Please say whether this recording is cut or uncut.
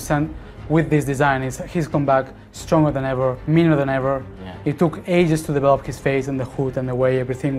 uncut